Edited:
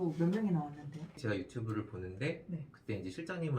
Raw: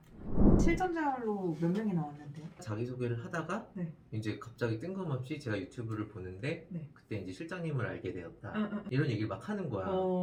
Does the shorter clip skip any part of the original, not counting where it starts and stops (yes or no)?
yes